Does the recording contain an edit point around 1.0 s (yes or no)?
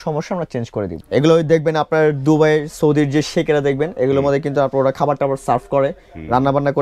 yes